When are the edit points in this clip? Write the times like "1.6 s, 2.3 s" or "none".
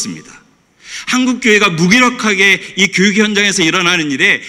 none